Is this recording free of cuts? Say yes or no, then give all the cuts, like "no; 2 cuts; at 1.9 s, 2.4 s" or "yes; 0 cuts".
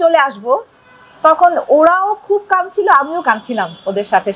yes; 0 cuts